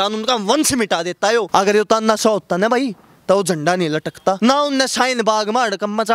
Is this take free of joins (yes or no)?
no